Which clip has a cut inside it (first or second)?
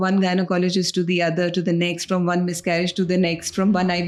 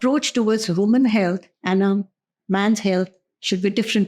second